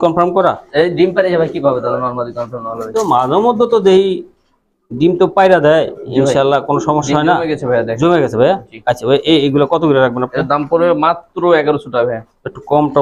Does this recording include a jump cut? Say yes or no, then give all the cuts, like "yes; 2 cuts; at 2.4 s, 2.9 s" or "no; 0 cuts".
no; 0 cuts